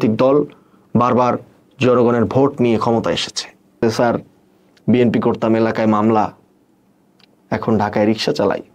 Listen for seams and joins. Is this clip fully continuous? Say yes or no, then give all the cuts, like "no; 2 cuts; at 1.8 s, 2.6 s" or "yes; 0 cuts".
no; 1 cut; at 3.8 s